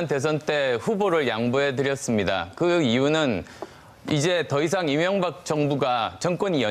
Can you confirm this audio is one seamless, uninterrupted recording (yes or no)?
no